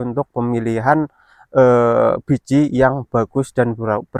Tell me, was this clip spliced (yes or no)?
no